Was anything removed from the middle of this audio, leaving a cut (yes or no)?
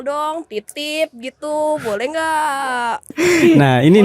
yes